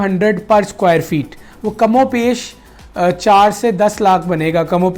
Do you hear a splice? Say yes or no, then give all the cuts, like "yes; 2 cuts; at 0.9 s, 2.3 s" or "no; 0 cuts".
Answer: no; 0 cuts